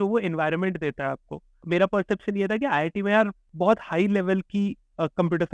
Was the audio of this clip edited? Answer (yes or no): yes